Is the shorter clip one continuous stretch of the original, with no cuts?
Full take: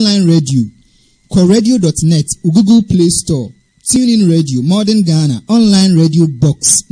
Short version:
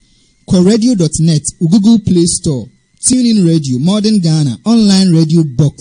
yes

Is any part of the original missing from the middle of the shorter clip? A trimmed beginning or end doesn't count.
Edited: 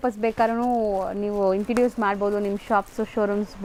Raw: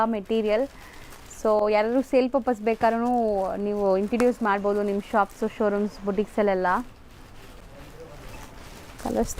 no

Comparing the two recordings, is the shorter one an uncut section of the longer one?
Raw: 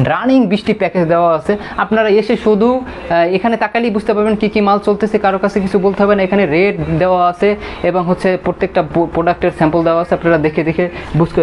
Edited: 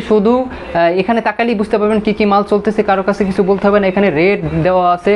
yes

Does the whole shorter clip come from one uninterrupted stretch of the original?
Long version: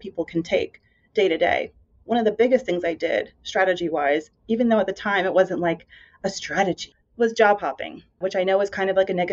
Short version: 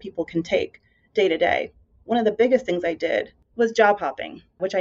no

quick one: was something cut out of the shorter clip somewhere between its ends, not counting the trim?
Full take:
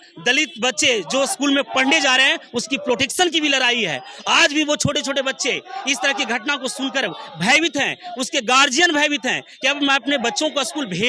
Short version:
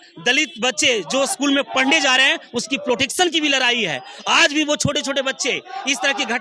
no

